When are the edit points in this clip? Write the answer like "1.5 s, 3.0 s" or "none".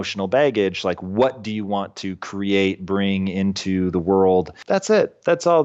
4.6 s